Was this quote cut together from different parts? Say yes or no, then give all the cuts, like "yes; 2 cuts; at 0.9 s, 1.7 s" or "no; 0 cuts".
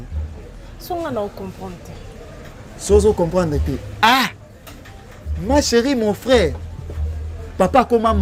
no; 0 cuts